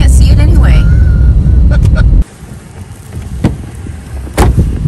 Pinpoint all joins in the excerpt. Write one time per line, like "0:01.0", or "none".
0:02.2